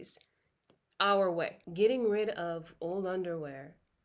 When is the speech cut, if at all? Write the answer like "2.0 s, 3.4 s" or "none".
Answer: 1.6 s